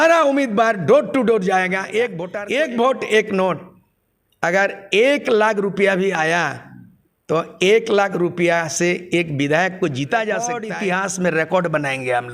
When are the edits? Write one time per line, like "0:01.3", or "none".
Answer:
0:02.3
0:10.7